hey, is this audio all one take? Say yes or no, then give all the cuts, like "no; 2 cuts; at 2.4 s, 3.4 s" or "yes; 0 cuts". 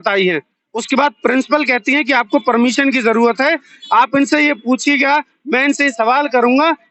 yes; 0 cuts